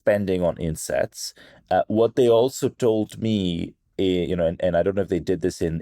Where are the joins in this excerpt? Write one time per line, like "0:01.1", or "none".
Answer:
none

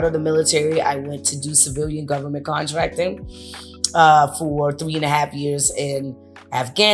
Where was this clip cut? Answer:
none

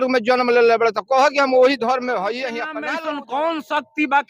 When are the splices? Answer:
0:02.8

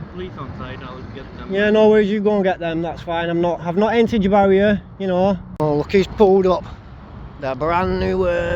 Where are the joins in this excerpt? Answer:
0:05.5

